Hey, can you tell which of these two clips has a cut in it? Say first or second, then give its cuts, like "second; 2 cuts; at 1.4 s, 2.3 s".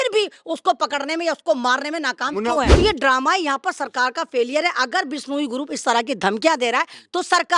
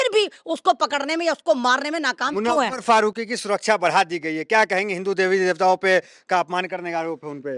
first; 1 cut; at 2.7 s